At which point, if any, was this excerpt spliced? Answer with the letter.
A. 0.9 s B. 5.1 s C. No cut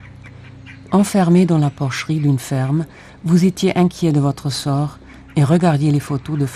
A